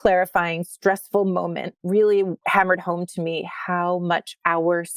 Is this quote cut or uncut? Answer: cut